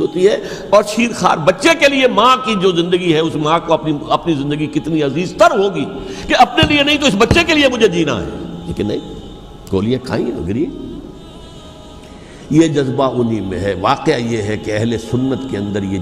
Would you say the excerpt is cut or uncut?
uncut